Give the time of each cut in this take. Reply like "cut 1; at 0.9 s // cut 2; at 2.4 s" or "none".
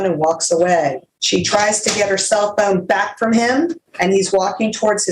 cut 1; at 1.1 s // cut 2; at 3.8 s